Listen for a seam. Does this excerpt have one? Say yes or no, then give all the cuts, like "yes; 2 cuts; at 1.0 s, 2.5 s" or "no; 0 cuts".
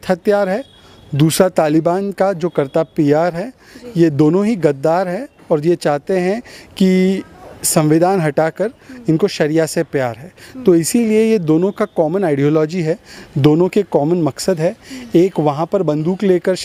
no; 0 cuts